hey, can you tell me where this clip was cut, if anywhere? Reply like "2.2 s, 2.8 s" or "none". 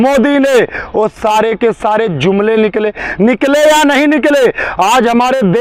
none